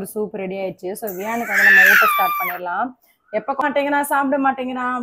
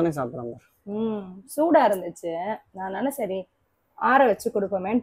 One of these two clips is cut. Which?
first; 1 cut; at 3.6 s

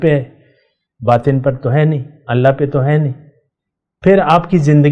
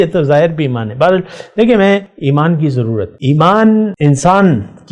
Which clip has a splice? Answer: second; 3 cuts; at 2.1 s, 3.1 s, 3.9 s

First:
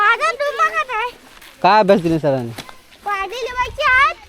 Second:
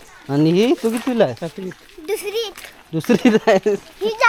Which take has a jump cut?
first; 1 cut; at 1.4 s

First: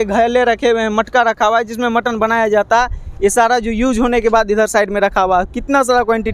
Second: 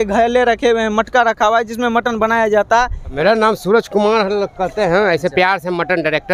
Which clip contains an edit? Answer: second; 1 cut; at 3.1 s

